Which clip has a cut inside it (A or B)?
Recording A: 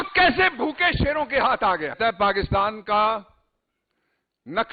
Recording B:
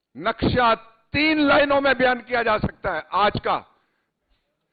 A